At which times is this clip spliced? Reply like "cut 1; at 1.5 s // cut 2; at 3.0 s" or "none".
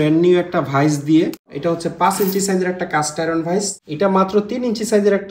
cut 1; at 1.5 s // cut 2; at 3.8 s